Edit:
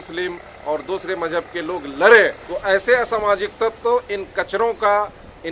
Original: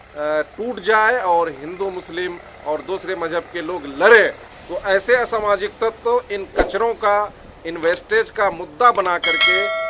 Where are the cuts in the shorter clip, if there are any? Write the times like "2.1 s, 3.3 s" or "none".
2.5 s

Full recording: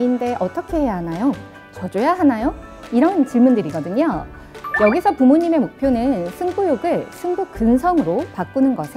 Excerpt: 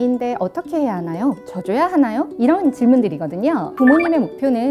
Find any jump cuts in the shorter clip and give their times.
1.5 s, 2.3 s, 3.8 s

